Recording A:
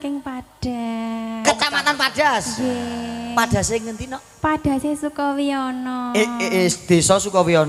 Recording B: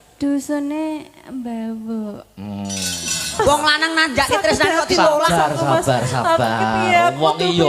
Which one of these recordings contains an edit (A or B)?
B